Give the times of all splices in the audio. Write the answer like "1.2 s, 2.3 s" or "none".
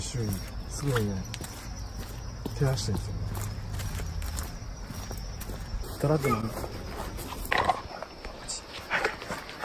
5.8 s, 7.4 s